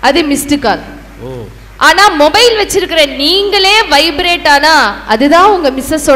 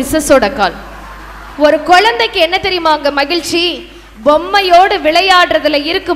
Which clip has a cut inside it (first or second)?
second